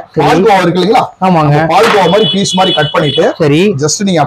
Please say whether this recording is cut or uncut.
uncut